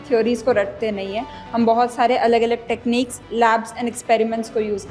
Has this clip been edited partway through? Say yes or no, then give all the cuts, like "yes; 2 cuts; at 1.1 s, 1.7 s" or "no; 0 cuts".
no; 0 cuts